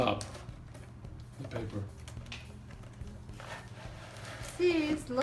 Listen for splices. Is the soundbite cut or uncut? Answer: uncut